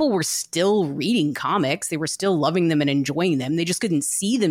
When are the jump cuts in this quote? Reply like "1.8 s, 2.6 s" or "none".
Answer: none